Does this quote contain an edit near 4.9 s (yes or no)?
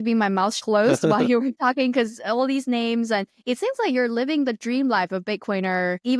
no